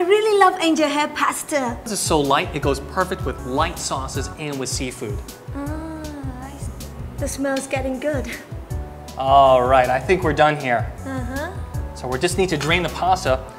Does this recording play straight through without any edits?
no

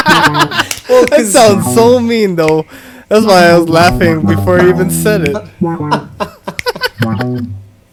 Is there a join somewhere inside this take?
no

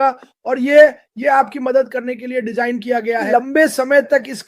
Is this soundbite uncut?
no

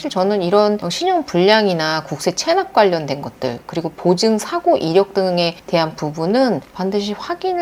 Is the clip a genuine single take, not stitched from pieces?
yes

